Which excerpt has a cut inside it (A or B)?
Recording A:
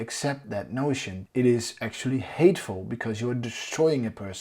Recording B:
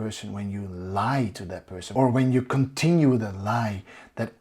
A